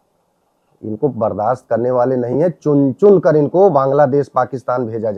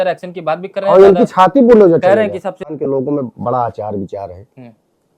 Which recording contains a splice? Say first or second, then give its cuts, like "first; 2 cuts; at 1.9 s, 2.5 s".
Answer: second; 1 cut; at 2.7 s